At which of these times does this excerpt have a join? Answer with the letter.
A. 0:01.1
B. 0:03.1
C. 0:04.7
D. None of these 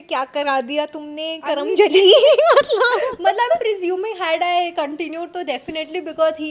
D